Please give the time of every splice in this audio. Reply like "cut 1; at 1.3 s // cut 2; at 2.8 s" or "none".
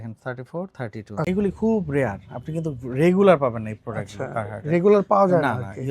cut 1; at 1.2 s